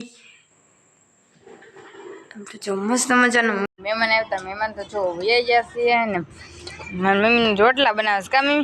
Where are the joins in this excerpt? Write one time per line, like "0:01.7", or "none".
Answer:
0:03.6